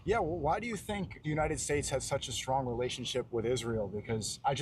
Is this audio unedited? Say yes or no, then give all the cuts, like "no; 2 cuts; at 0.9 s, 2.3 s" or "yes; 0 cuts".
no; 1 cut; at 1.1 s